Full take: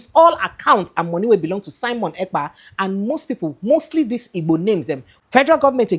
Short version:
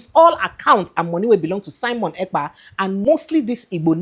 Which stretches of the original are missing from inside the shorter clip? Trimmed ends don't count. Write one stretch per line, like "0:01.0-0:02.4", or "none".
0:03.0-0:03.7